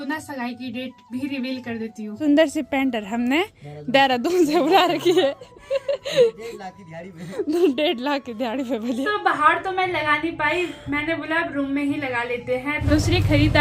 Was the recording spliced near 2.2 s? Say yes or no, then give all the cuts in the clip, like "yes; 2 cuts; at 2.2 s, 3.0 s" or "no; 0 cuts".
yes; 3 cuts; at 2.2 s, 9.1 s, 12.8 s